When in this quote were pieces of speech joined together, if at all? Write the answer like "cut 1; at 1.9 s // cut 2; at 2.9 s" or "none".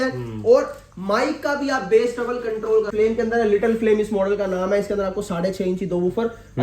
cut 1; at 2.9 s